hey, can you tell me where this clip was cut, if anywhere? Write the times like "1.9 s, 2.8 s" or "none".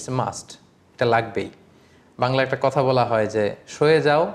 none